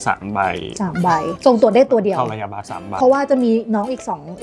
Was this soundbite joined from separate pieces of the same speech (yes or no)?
yes